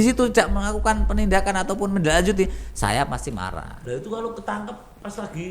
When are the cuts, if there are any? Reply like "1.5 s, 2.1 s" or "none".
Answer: 3.8 s